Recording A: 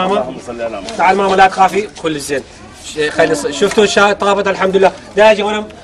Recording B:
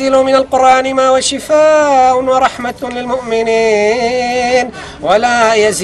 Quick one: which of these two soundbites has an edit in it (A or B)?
B